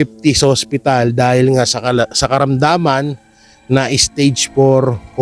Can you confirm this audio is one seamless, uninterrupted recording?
yes; 0 cuts

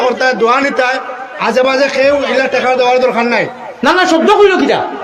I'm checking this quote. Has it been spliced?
no; 0 cuts

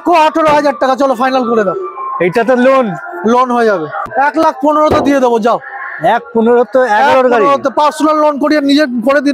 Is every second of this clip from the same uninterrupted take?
no; 1 cut; at 4.0 s

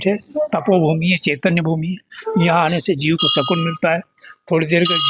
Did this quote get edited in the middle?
no; 0 cuts

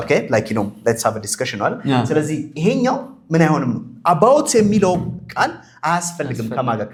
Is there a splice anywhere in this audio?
no; 0 cuts

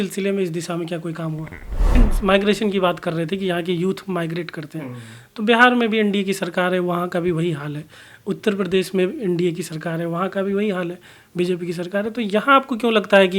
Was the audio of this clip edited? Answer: yes; 1 cut; at 2.0 s

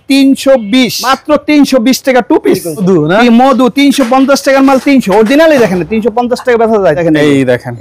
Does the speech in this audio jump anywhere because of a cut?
yes; 3 cuts; at 1.1 s, 2.8 s, 7.0 s

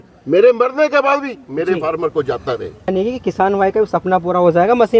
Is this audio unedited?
no; 1 cut; at 2.9 s

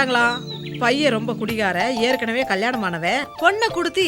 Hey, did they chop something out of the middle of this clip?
no; 0 cuts

